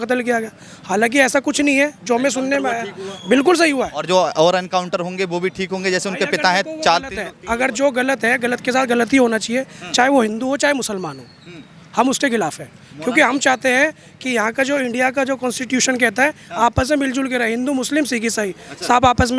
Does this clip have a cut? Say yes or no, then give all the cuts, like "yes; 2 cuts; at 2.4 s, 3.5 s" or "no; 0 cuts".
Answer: no; 0 cuts